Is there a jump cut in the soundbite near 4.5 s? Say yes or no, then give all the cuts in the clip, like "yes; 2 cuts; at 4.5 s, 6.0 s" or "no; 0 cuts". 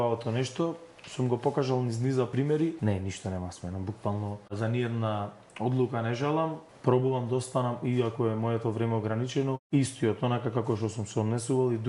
yes; 4 cuts; at 2.5 s, 4.5 s, 6.7 s, 9.6 s